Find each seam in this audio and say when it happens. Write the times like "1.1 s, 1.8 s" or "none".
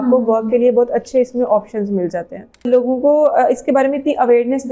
2.7 s